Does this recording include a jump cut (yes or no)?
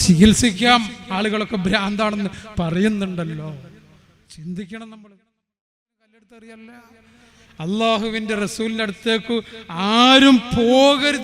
yes